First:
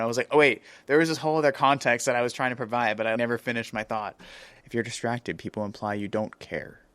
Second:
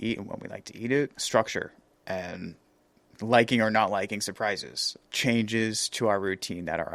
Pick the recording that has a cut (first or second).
first